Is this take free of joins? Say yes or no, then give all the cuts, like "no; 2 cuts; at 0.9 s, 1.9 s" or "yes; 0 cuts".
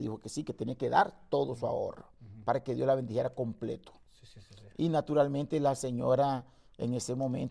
yes; 0 cuts